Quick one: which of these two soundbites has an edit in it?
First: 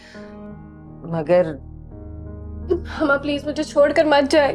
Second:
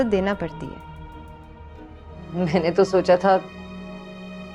second; 1 cut; at 2.2 s

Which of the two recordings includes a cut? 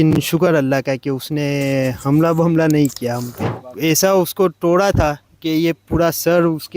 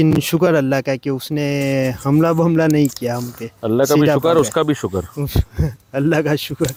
first; 1 cut; at 3.5 s

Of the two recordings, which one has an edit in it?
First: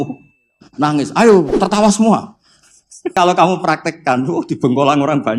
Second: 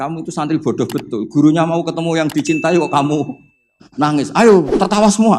first; 1 cut; at 3.1 s

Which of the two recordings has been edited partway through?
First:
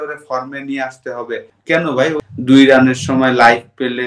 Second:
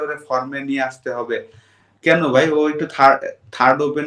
first; 2 cuts; at 1.5 s, 2.2 s

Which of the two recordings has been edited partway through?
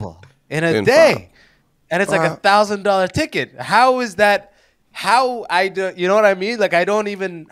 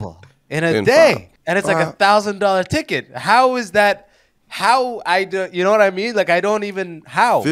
second; 1 cut; at 1.3 s

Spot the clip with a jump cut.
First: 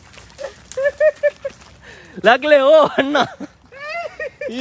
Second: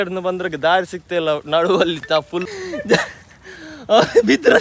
second; 1 cut; at 2.6 s

